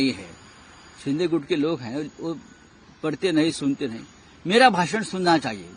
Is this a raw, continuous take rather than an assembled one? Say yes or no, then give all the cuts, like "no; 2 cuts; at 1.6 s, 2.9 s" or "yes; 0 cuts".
yes; 0 cuts